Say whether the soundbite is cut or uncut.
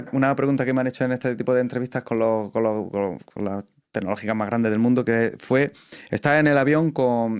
uncut